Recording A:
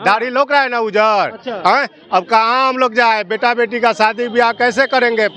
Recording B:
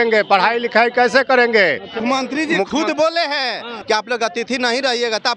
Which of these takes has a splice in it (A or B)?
B